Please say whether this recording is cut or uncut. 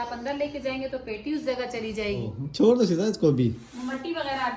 cut